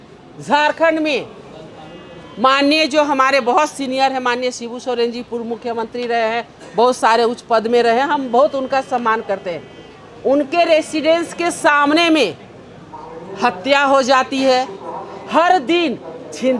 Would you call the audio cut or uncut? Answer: uncut